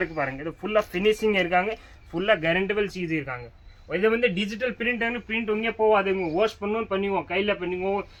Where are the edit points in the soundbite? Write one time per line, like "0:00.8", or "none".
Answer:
none